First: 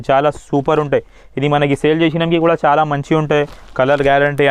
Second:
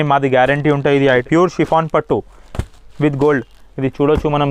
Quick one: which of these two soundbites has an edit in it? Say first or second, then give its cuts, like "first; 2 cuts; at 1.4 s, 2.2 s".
second; 1 cut; at 1.2 s